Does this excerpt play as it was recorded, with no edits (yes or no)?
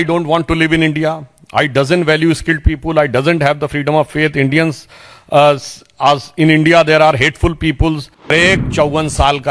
no